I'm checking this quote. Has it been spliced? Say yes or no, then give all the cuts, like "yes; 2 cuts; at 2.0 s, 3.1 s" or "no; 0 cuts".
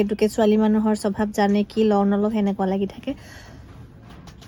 no; 0 cuts